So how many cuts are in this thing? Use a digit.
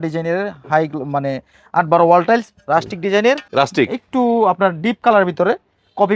1